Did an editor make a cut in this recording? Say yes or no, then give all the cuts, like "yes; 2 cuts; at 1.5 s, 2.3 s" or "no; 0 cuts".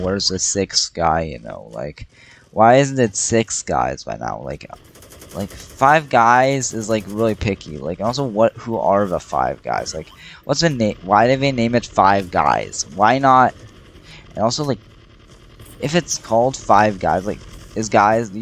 yes; 1 cut; at 4.6 s